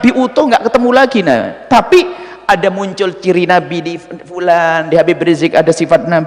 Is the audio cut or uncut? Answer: uncut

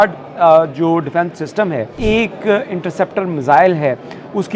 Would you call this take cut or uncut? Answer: cut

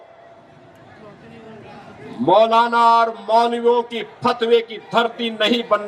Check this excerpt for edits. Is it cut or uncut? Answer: uncut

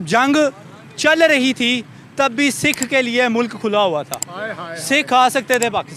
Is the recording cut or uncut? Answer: uncut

